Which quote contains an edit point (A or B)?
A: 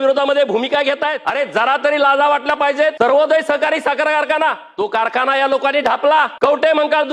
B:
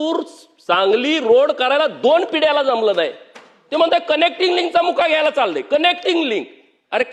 A